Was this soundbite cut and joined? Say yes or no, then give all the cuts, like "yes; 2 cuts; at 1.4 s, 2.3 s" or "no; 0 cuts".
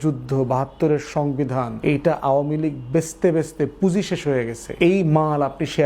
yes; 2 cuts; at 1.7 s, 4.6 s